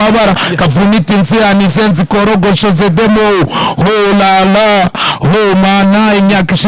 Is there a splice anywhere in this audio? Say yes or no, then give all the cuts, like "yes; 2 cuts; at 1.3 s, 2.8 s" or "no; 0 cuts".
no; 0 cuts